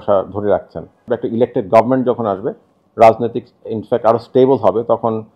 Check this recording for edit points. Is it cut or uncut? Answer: cut